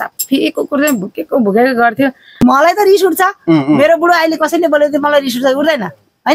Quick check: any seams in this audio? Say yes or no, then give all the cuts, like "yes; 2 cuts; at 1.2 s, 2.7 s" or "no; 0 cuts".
yes; 1 cut; at 2.4 s